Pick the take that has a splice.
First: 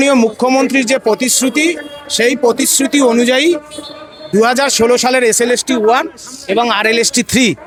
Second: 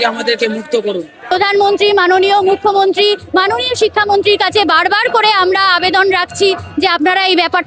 second; 1 cut; at 1.2 s

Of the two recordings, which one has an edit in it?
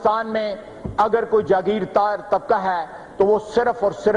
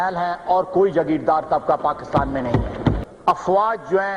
second; 1 cut; at 3.0 s

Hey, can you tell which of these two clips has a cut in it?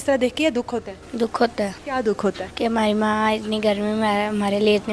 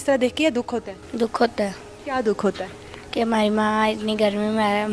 first; 2 cuts; at 1.8 s, 2.5 s

